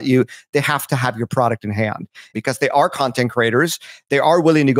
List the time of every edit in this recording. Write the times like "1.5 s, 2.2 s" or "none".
2.3 s